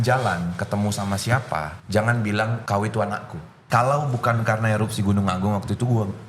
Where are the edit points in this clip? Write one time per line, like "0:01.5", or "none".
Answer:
0:01.8
0:02.6
0:03.5